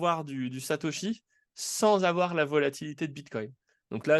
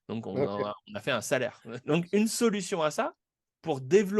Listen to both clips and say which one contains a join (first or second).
second